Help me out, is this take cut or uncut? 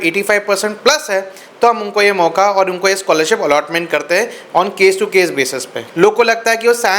cut